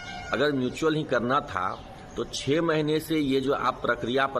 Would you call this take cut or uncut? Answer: uncut